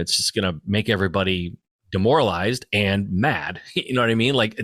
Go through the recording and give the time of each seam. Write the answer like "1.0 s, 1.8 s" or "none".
none